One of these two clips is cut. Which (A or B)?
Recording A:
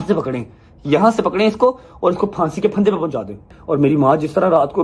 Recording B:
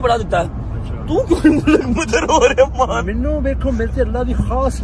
A